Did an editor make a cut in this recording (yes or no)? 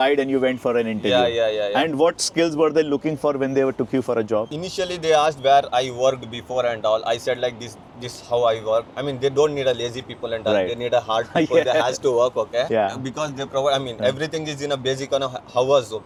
no